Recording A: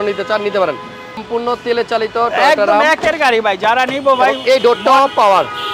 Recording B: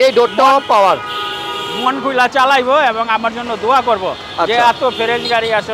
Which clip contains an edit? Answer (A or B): A